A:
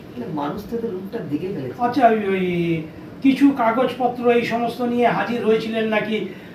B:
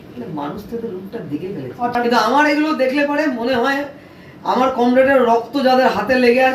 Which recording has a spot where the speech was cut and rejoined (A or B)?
B